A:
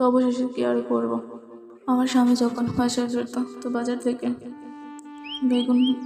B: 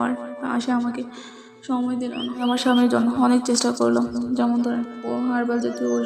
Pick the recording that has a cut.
B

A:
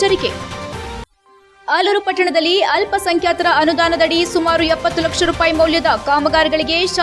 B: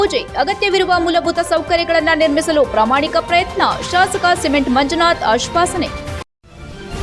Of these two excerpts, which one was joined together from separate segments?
B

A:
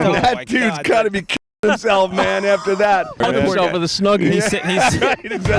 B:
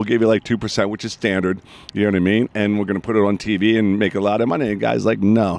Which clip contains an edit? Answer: A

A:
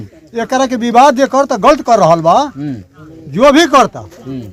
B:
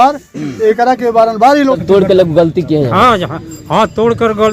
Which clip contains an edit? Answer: B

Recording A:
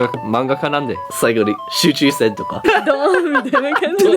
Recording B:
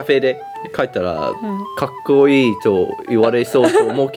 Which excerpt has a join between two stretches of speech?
A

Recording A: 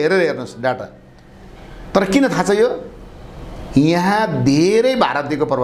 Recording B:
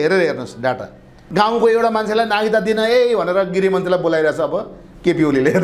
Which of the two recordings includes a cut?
B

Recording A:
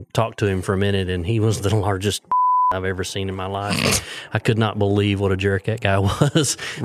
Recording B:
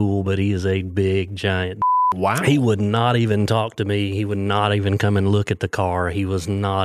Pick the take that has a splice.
B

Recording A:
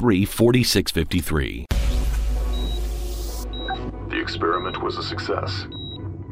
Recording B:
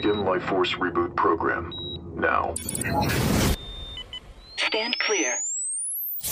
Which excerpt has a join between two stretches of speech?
A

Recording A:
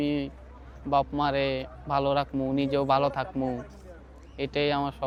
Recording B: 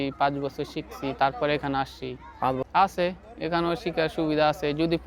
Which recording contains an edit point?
B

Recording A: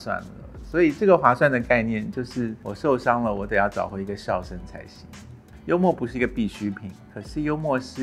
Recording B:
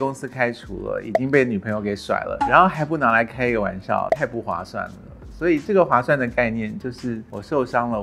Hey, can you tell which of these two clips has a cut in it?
A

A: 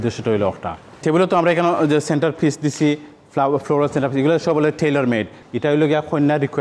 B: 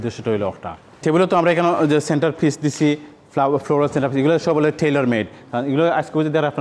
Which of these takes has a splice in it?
A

